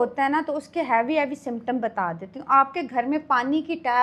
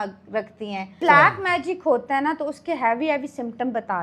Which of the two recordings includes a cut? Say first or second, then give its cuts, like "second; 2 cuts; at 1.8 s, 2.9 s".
second; 1 cut; at 1.0 s